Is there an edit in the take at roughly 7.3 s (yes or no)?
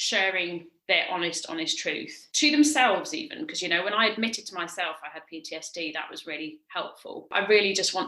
yes